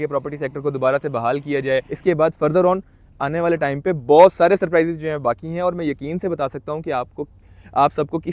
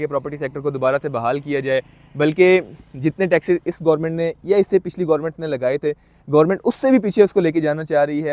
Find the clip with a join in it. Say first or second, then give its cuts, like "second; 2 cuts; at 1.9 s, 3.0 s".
first; 1 cut; at 1.9 s